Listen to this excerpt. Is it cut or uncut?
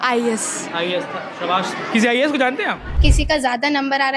cut